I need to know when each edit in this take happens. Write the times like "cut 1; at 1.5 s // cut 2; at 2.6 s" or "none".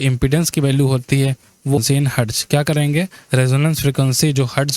cut 1; at 1.8 s